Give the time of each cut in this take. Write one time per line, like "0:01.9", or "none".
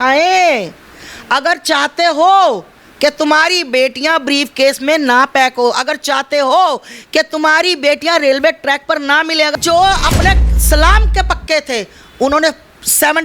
0:09.5